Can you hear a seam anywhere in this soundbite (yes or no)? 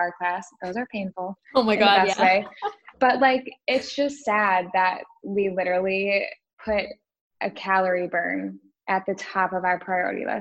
yes